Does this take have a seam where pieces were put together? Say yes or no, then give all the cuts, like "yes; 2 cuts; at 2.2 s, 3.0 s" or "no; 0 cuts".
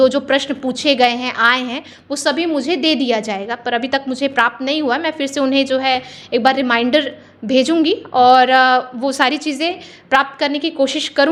no; 0 cuts